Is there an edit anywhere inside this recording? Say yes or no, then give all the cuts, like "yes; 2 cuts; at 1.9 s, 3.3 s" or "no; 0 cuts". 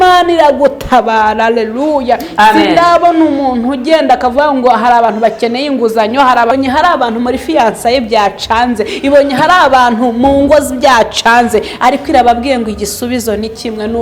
yes; 1 cut; at 6.5 s